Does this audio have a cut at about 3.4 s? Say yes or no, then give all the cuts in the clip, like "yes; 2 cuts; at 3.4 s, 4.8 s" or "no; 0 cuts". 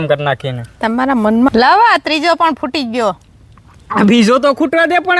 no; 1 cut; at 1.5 s